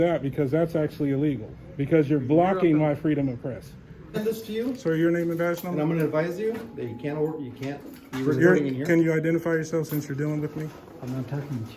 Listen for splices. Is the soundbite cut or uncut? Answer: cut